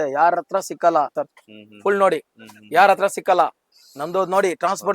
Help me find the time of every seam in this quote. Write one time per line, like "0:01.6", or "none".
0:01.2